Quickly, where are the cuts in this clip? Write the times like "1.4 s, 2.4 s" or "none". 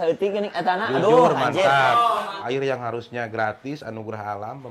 2.4 s